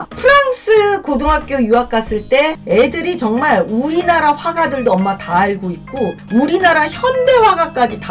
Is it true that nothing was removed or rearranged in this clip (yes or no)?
no